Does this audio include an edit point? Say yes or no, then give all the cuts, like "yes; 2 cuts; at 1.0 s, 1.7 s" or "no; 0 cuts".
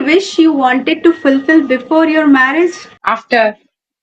yes; 1 cut; at 2.9 s